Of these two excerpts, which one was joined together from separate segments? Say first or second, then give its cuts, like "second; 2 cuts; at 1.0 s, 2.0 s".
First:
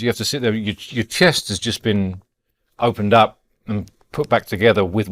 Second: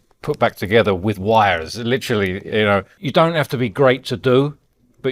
second; 1 cut; at 3.0 s